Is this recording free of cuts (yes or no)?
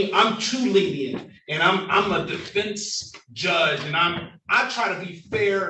yes